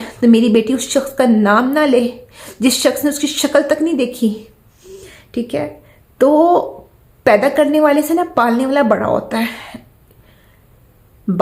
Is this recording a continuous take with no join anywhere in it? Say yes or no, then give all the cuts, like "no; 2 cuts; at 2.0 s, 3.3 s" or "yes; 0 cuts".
yes; 0 cuts